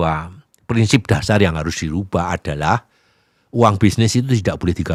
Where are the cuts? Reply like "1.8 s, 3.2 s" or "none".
none

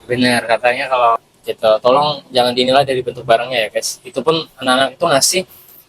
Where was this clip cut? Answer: 1.2 s

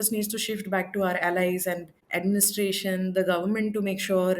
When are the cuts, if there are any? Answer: 2.0 s

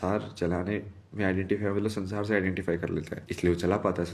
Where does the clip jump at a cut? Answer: 3.2 s

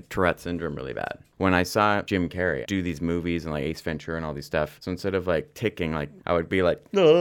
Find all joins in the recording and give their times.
1.2 s, 2.6 s, 4.8 s, 6.1 s

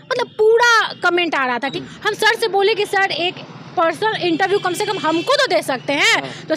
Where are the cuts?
1.8 s

